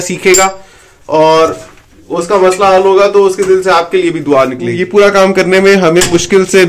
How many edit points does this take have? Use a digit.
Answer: 1